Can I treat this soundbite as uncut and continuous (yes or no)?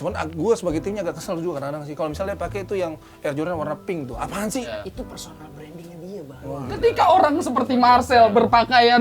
no